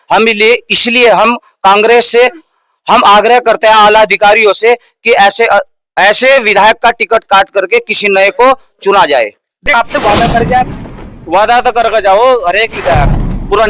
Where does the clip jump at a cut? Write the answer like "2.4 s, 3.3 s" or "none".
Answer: 9.7 s